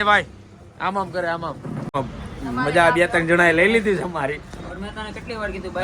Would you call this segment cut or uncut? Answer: cut